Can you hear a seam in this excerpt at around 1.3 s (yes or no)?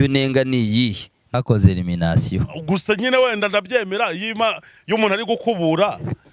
yes